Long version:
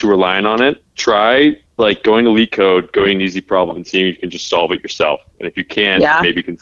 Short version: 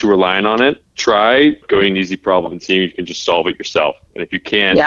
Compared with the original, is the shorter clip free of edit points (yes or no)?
no